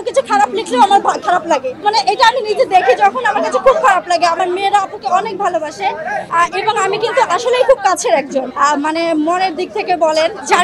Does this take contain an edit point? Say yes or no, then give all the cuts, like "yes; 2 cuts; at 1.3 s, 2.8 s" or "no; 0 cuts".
no; 0 cuts